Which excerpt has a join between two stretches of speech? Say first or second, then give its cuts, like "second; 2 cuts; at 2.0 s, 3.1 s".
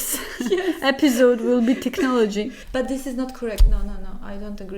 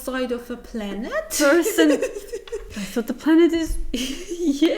first; 1 cut; at 2.6 s